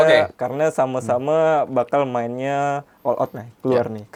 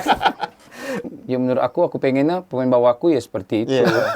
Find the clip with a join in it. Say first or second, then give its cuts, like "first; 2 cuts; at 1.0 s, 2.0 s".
second; 1 cut; at 1.1 s